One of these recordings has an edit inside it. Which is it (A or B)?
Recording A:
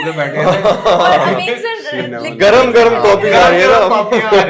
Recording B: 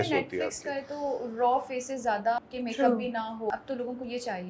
B